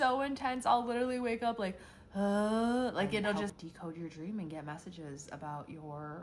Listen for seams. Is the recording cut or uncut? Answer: cut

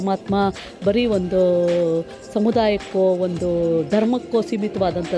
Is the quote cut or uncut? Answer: uncut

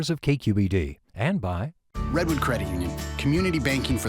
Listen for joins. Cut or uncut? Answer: cut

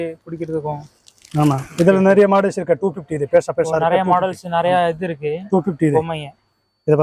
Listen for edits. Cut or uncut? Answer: uncut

